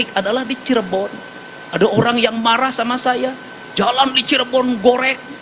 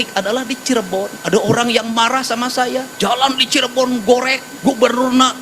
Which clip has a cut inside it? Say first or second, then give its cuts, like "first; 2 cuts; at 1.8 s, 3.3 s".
second; 3 cuts; at 1.2 s, 2.9 s, 4.4 s